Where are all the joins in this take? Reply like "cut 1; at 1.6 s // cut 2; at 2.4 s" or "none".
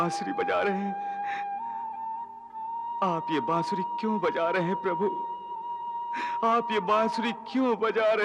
none

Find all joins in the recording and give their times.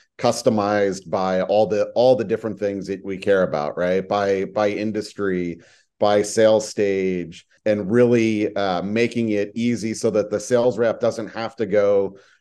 cut 1; at 7.5 s

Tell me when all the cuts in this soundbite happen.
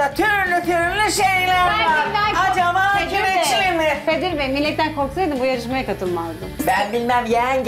cut 1; at 4.0 s // cut 2; at 6.6 s

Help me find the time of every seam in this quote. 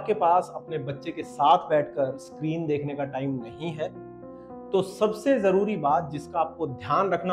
none

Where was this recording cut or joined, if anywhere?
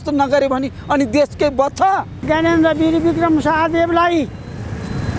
cut 1; at 2.2 s

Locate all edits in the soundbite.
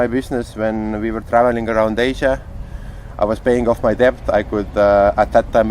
none

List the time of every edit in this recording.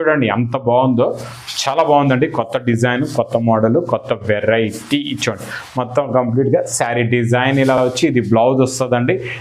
none

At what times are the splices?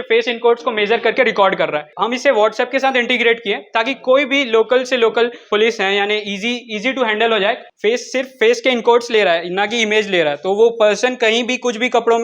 cut 1; at 1.9 s // cut 2; at 5.5 s // cut 3; at 7.7 s

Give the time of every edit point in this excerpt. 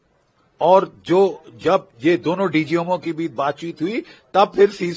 none

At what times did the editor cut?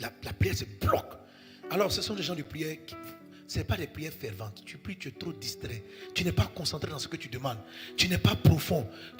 none

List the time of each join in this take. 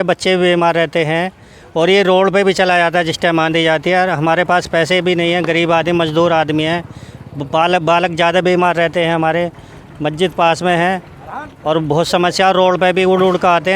none

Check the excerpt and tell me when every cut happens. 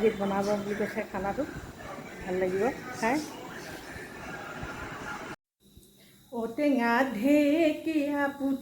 cut 1; at 5.5 s

